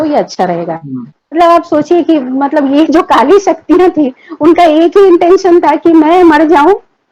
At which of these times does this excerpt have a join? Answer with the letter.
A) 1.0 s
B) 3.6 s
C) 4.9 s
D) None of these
A